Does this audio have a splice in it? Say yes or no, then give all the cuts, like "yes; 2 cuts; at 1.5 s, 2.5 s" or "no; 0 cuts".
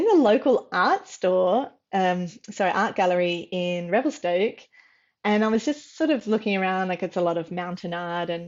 no; 0 cuts